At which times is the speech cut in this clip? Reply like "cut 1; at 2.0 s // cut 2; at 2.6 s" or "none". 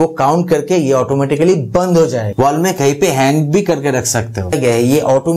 cut 1; at 2.3 s // cut 2; at 4.5 s

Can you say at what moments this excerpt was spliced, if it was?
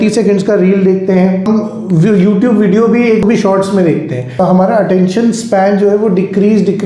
cut 1; at 1.5 s // cut 2; at 3.2 s // cut 3; at 4.4 s

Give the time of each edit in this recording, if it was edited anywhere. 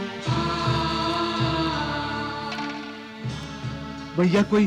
none

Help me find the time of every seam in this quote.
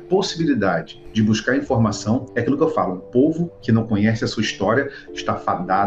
cut 1; at 1.0 s // cut 2; at 2.3 s // cut 3; at 3.5 s

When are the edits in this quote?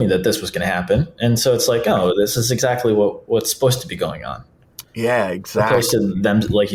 none

